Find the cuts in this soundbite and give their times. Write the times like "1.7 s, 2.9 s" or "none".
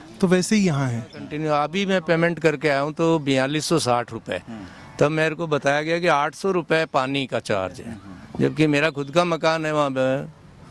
1.3 s

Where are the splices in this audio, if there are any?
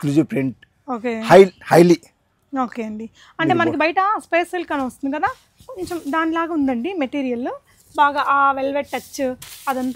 none

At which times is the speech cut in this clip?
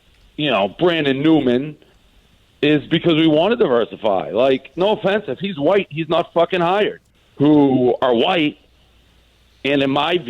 7.0 s

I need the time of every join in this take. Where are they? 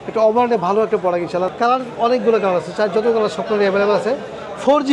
1.5 s

